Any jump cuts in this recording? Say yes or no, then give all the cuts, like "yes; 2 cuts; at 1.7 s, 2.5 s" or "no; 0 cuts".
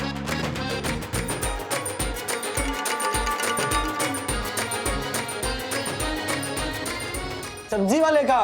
yes; 2 cuts; at 1.1 s, 7.7 s